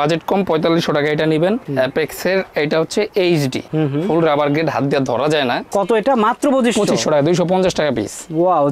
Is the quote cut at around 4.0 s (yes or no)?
no